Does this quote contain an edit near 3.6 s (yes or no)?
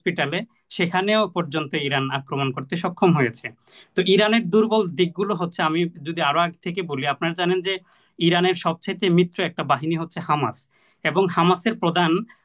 no